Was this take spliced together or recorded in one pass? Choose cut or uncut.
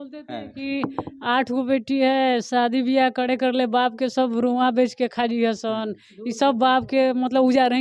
uncut